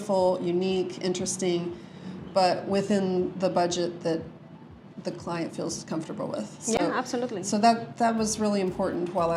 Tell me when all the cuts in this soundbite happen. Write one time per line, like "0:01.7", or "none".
none